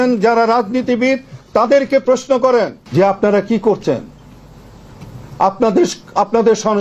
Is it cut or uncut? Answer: cut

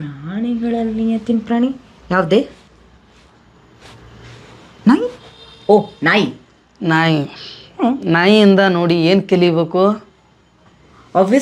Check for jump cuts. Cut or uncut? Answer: uncut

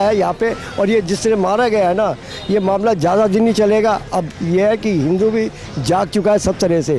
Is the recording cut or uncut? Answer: uncut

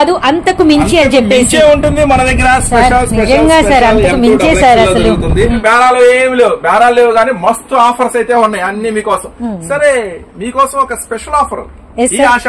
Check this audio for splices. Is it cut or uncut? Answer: cut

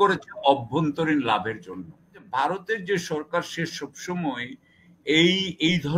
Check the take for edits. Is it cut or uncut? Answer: cut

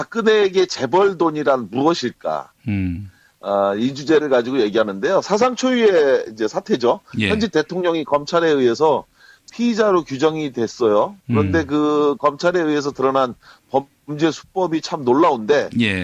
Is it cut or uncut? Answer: uncut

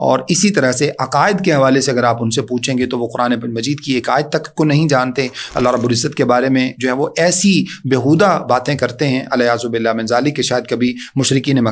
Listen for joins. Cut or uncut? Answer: uncut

